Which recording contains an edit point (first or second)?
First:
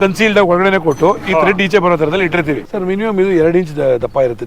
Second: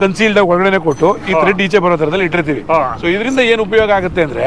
first